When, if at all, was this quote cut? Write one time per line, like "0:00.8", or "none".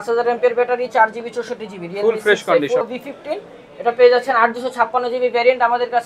0:02.8